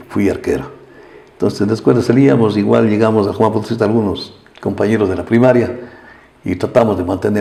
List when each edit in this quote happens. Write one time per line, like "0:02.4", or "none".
none